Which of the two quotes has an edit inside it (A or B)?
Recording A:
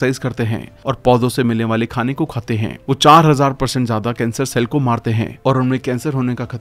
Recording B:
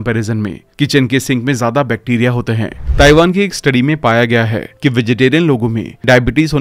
B